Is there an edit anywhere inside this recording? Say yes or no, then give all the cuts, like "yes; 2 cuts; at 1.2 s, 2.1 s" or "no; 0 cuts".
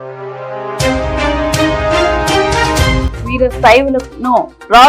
no; 0 cuts